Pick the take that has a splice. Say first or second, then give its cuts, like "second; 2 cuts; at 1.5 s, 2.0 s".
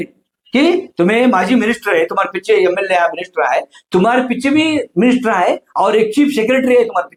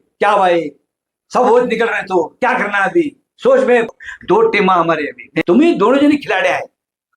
second; 1 cut; at 3.9 s